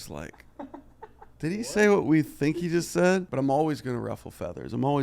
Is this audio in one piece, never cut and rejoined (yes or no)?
no